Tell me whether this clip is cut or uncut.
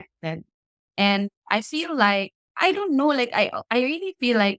cut